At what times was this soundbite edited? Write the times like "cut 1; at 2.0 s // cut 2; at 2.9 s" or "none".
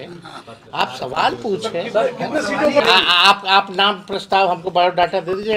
cut 1; at 2.8 s